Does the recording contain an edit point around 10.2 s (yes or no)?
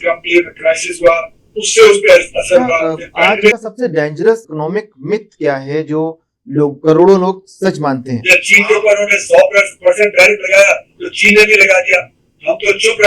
no